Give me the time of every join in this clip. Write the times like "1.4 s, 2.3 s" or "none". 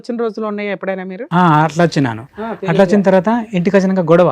none